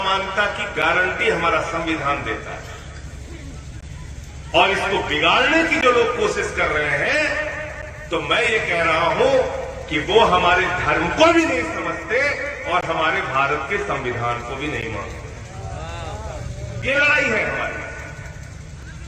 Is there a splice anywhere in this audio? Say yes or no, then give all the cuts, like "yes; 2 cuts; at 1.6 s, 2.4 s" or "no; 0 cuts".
no; 0 cuts